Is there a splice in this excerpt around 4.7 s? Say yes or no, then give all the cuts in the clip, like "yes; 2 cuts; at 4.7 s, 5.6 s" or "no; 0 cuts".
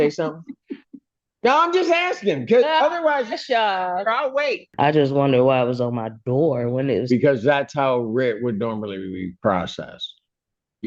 yes; 1 cut; at 4.7 s